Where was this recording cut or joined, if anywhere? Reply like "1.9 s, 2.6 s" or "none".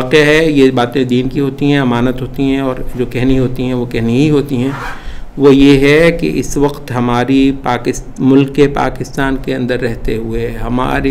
none